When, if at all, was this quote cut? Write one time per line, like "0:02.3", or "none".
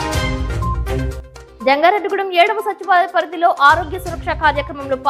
0:01.2